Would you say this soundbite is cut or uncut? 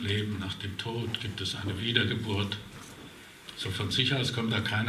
uncut